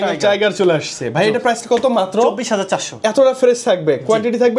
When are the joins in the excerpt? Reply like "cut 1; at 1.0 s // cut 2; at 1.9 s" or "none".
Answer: none